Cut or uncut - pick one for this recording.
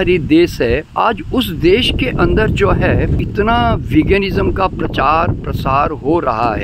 cut